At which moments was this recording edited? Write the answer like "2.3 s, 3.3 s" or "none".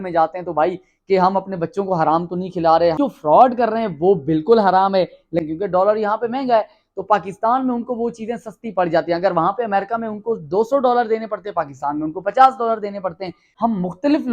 3.0 s, 5.4 s, 13.4 s

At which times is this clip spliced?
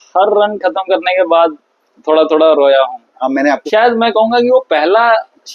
3.6 s

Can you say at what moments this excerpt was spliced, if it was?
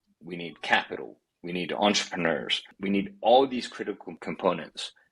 2.7 s, 4.1 s

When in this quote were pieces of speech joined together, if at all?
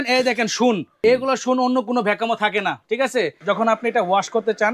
0.9 s, 3.4 s

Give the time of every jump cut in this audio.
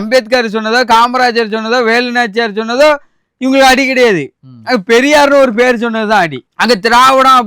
6.4 s

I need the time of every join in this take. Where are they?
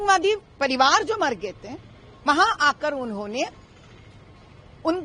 none

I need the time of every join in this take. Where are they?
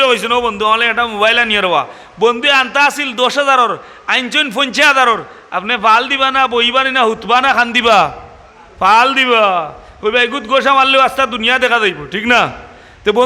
none

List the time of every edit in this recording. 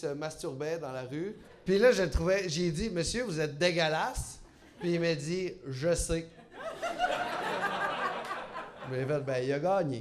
1.5 s

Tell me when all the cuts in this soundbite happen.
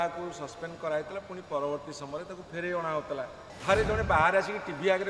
3.5 s

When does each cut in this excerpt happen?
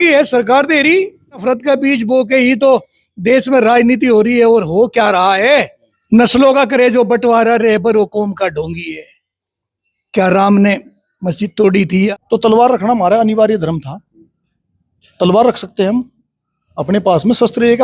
1.4 s, 5.9 s, 12.1 s

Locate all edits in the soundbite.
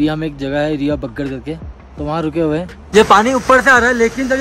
2.7 s

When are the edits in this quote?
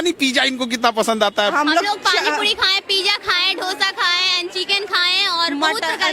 1.5 s

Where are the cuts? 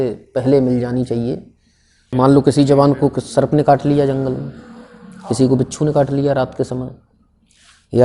2.0 s

